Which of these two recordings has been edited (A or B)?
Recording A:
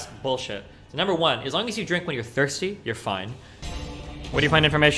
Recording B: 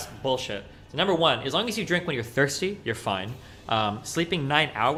A